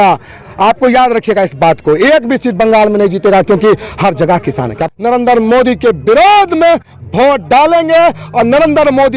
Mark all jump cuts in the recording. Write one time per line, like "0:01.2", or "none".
0:04.8